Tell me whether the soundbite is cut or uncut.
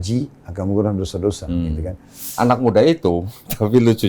cut